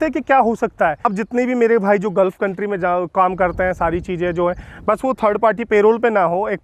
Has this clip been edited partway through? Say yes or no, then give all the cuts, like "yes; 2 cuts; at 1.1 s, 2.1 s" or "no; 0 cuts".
yes; 1 cut; at 1.1 s